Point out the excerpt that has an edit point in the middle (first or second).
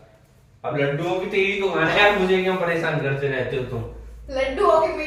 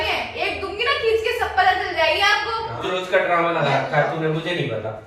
second